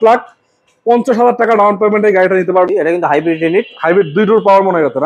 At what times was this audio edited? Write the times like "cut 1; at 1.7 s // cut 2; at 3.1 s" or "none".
cut 1; at 2.7 s